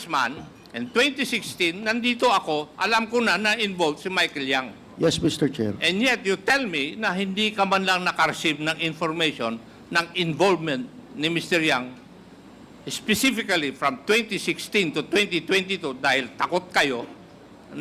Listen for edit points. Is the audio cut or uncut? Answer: cut